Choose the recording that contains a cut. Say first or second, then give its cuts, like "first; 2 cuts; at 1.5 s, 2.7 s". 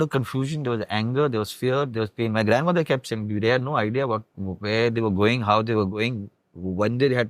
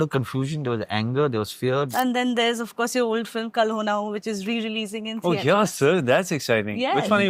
second; 1 cut; at 1.9 s